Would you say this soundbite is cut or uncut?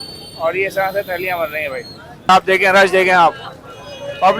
cut